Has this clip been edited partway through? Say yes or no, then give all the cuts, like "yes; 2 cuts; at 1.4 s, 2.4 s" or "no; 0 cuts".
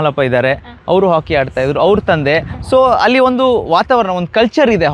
no; 0 cuts